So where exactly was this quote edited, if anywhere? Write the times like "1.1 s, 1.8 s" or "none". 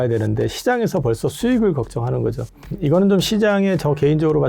2.7 s